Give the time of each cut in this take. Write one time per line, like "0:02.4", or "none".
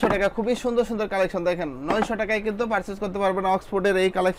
none